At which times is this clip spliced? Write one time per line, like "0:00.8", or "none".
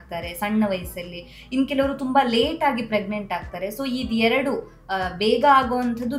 none